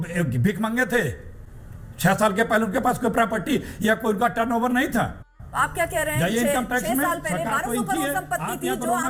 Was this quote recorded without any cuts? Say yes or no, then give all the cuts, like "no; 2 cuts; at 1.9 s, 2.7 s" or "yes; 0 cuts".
yes; 0 cuts